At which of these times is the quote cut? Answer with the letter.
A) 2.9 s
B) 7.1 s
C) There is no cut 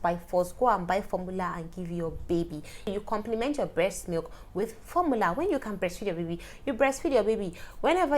A